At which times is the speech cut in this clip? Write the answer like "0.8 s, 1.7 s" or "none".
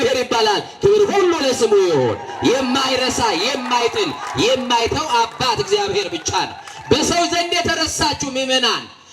none